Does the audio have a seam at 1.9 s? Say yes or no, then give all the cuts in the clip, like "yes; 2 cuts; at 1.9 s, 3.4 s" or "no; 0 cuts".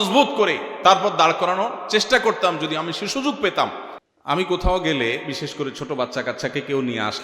no; 1 cut; at 3.9 s